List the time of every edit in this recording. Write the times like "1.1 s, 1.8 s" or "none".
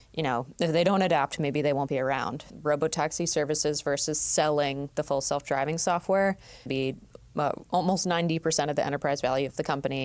2.5 s, 6.7 s